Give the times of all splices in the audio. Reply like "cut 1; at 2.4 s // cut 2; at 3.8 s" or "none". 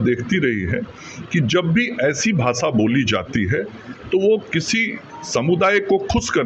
none